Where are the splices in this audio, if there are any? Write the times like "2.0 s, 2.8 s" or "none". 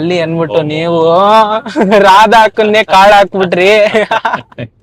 none